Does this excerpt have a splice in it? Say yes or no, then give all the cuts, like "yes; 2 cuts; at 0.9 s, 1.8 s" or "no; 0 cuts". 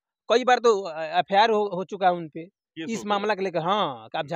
no; 0 cuts